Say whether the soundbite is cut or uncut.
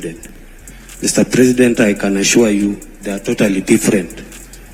uncut